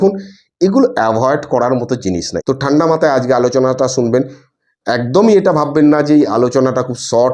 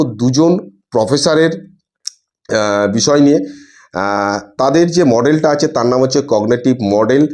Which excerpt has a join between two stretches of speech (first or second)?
first